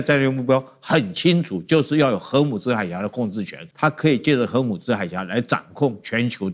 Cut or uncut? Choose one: cut